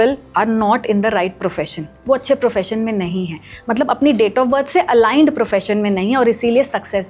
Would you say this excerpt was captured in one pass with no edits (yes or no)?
yes